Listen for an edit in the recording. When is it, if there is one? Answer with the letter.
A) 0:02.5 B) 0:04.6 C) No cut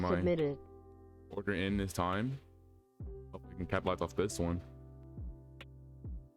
B